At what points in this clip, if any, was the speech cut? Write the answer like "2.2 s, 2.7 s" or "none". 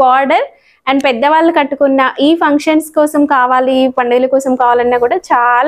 none